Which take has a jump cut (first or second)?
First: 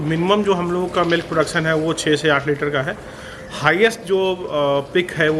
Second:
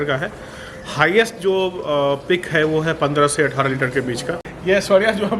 second